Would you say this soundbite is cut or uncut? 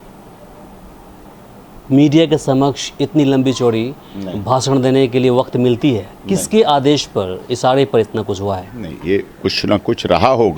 uncut